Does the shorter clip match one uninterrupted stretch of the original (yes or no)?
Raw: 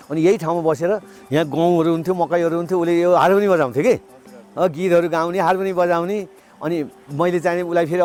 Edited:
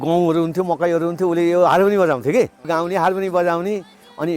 no